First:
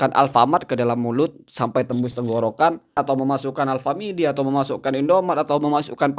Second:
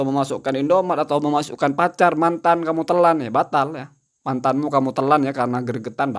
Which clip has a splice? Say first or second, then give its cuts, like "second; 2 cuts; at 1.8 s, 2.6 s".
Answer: first; 1 cut; at 3.0 s